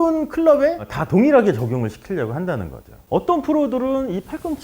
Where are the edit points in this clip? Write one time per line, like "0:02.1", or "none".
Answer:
0:03.0